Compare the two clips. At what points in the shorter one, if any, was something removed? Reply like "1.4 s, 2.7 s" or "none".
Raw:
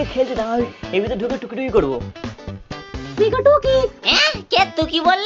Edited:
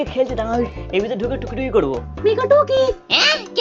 2.1 s